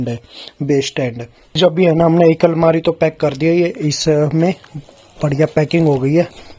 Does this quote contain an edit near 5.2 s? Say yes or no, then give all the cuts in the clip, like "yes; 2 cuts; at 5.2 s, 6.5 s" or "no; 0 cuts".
no; 1 cut; at 1.6 s